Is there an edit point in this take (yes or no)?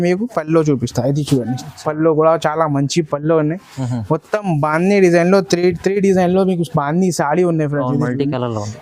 no